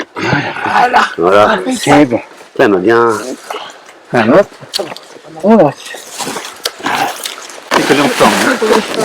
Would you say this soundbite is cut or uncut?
cut